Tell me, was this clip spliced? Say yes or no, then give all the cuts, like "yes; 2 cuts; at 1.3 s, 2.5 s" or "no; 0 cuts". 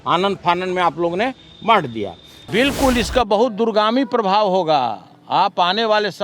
yes; 1 cut; at 2.4 s